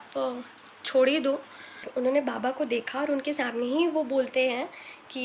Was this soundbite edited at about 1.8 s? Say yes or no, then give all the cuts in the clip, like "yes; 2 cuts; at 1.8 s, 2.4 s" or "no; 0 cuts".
yes; 1 cut; at 1.8 s